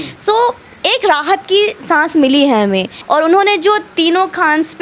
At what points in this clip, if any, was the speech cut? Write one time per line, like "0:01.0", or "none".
0:02.9